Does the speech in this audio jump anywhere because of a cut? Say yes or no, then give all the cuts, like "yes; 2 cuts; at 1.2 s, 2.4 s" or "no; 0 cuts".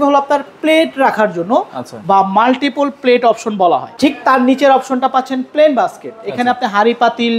yes; 1 cut; at 3.9 s